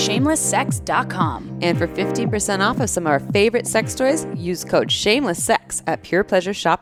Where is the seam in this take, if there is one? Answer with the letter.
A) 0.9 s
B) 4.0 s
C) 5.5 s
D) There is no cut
D